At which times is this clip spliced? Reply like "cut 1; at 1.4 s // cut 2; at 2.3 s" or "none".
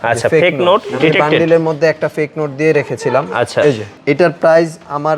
cut 1; at 3.9 s